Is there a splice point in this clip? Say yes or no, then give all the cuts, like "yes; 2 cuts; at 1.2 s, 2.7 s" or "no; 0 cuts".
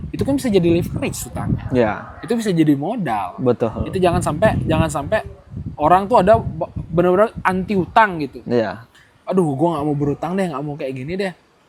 no; 0 cuts